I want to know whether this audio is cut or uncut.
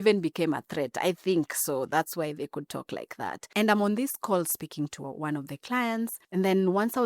cut